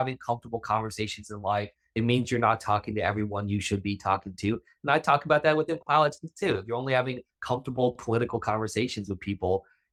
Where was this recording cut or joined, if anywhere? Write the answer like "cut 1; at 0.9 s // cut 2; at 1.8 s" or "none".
none